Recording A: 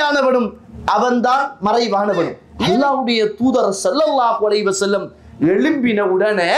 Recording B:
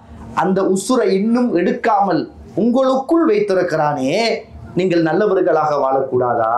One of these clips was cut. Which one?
A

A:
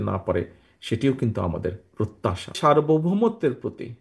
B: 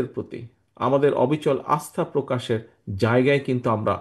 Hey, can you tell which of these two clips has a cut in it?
A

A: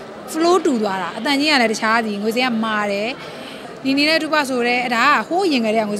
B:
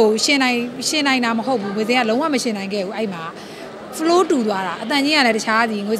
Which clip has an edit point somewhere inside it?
A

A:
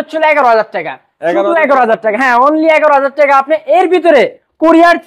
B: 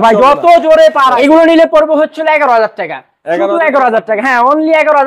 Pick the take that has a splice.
B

